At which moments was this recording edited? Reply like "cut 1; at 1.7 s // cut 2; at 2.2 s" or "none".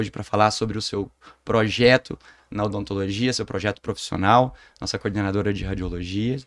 none